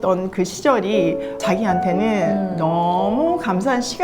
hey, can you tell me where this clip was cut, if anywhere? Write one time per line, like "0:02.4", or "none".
0:01.3

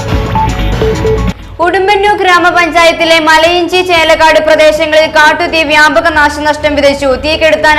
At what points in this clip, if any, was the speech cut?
0:01.3

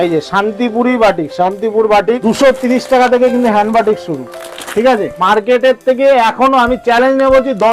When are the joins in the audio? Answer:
0:02.2
0:05.1

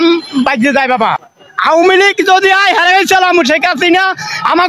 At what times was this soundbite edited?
0:01.2

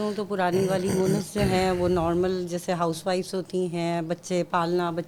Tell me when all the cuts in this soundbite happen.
none

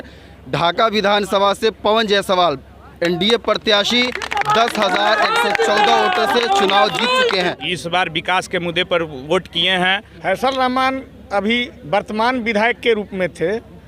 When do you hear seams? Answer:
0:07.5
0:10.1

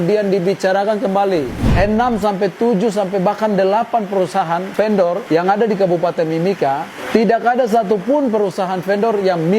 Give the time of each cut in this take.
0:01.7
0:04.9

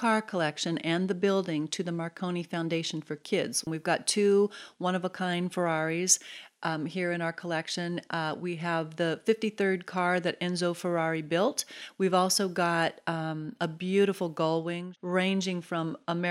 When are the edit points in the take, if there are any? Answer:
0:03.7
0:11.8
0:14.9

